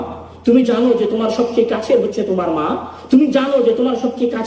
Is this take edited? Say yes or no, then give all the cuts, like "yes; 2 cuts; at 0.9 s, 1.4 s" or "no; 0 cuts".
no; 0 cuts